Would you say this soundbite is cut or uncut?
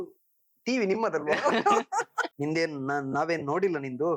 cut